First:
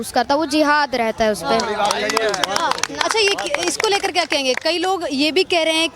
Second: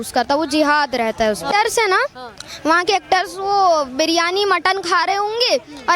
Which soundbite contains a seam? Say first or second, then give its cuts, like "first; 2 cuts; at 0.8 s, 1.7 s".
second; 1 cut; at 1.4 s